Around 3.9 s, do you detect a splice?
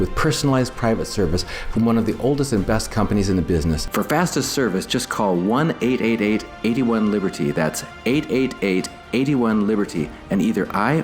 yes; 1 cut; at 3.9 s

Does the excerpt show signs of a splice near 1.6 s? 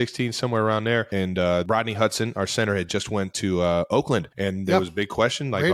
yes; 2 cuts; at 1.6 s, 4.3 s

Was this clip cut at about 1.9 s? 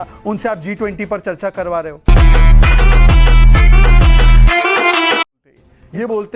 no; 1 cut; at 5.3 s

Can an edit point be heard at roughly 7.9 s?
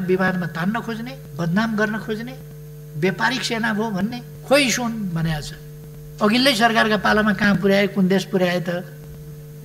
no; 2 cuts; at 1.2 s, 4.3 s

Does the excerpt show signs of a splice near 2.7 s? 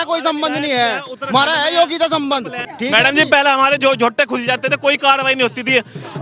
yes; 1 cut; at 2.7 s

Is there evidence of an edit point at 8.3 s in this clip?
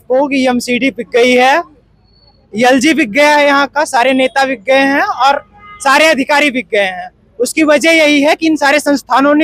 no; 0 cuts

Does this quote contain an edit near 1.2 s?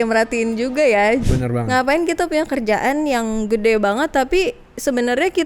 yes; 1 cut; at 1.2 s

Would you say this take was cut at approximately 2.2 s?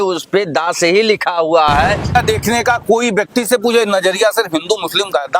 yes; 1 cut; at 2.2 s

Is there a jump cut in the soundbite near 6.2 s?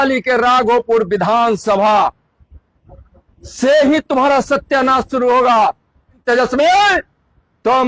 yes; 1 cut; at 6.2 s

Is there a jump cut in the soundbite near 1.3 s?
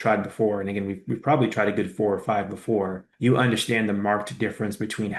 no; 0 cuts

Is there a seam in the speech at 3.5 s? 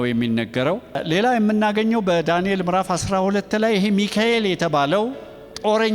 no; 1 cut; at 1.0 s

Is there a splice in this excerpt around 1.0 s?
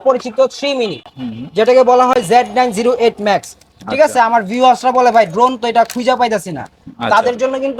no; 0 cuts

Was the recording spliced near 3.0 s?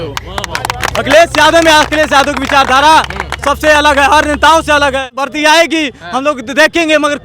no; 1 cut; at 5.2 s

